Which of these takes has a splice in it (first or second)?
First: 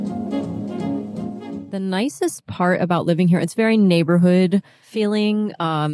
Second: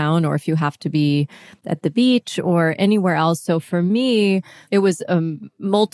first